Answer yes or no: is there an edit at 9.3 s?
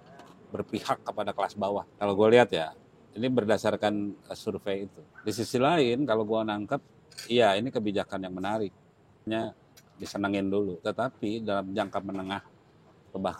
yes